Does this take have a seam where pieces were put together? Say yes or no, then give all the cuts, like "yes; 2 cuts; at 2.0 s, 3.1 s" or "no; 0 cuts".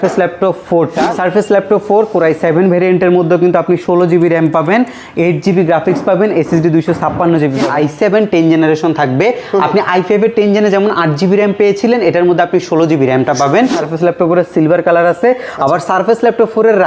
yes; 3 cuts; at 1.2 s, 7.6 s, 13.7 s